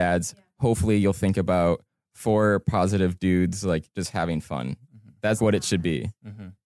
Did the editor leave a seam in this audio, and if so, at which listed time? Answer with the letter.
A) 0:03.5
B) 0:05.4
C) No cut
B